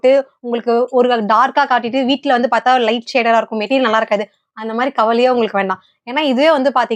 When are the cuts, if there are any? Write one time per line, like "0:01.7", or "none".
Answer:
none